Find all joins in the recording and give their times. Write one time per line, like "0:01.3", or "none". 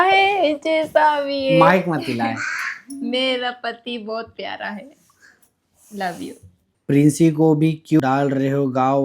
0:06.7
0:08.0